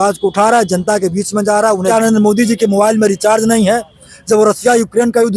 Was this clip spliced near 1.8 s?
yes; 1 cut; at 1.8 s

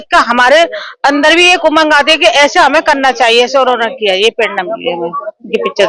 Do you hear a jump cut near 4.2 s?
no; 0 cuts

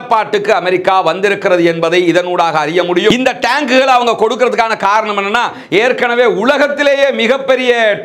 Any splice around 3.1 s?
yes; 1 cut; at 3.1 s

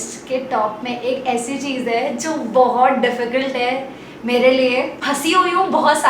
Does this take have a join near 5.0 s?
no; 0 cuts

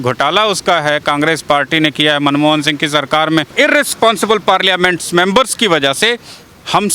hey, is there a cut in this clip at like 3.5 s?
yes; 1 cut; at 3.5 s

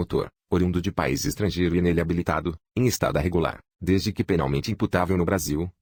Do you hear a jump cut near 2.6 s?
no; 0 cuts

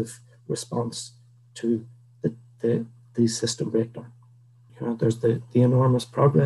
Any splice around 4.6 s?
yes; 1 cut; at 4.6 s

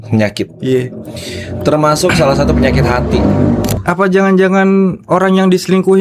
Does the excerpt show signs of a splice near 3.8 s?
yes; 1 cut; at 3.8 s

